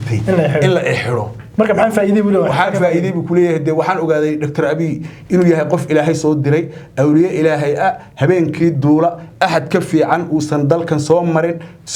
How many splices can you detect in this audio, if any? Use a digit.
0